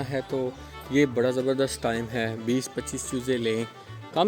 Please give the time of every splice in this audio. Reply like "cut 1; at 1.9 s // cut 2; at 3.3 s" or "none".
none